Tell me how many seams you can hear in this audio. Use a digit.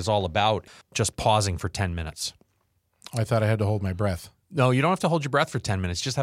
1